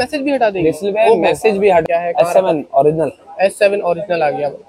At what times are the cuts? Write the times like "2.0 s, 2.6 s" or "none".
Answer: 1.8 s